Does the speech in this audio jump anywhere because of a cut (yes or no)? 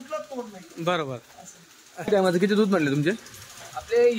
yes